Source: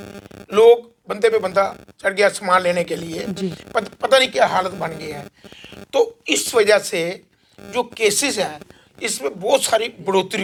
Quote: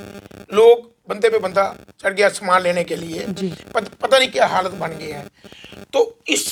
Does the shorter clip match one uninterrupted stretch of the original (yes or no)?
yes